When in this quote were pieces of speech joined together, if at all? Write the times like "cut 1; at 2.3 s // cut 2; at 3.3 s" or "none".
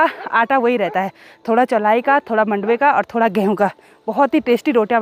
none